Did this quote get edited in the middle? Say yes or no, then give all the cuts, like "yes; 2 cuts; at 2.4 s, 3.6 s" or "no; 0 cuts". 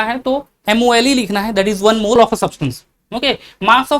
yes; 1 cut; at 2.2 s